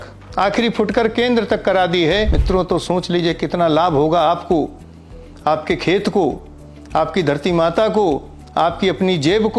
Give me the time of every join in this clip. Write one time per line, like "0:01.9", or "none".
0:02.4